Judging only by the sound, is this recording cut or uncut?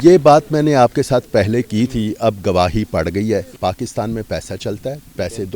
cut